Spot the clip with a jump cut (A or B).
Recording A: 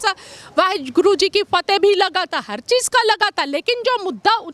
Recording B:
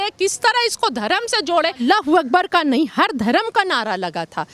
B